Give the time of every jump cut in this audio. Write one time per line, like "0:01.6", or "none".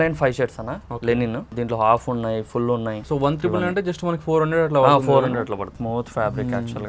0:01.5
0:03.0
0:05.7